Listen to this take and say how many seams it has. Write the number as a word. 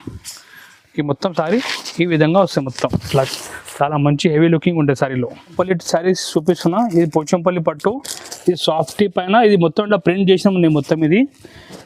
one